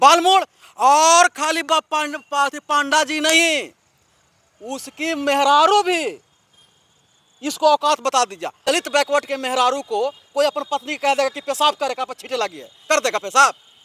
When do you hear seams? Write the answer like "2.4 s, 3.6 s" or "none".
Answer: 8.5 s